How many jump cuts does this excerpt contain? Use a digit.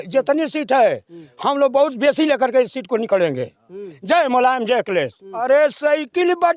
1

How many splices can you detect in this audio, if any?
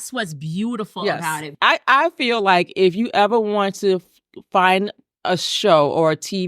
1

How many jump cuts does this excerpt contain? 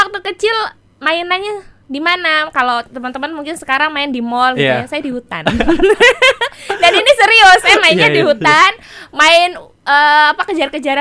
0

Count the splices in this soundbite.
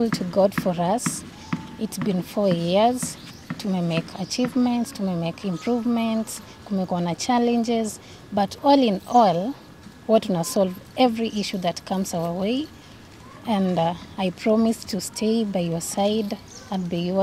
0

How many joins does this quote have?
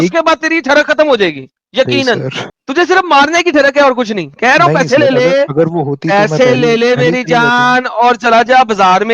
0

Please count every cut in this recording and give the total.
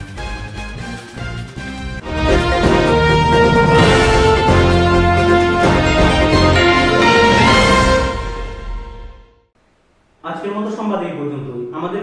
0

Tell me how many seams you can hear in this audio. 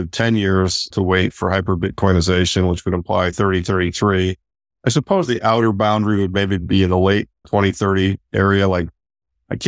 2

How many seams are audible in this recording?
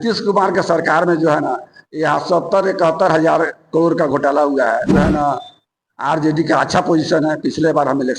1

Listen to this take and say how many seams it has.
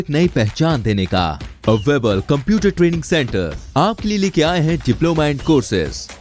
0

